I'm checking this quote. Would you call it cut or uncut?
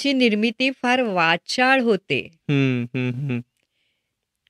uncut